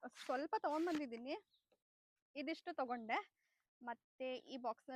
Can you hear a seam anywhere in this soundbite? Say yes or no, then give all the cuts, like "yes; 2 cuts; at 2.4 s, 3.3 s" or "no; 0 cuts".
no; 0 cuts